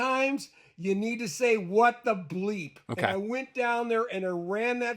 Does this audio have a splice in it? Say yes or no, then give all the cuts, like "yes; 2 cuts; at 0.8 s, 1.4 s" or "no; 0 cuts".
yes; 1 cut; at 2.8 s